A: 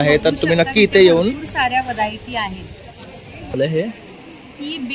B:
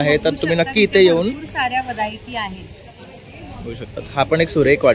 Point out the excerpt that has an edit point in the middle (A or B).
A